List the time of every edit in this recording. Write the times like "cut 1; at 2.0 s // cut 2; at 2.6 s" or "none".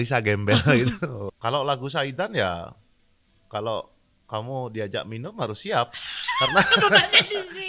cut 1; at 1.2 s